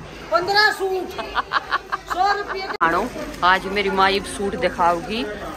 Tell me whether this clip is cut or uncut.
cut